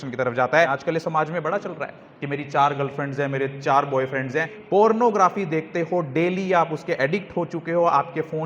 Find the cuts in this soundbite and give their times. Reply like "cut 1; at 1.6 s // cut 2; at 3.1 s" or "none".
cut 1; at 1.0 s // cut 2; at 4.8 s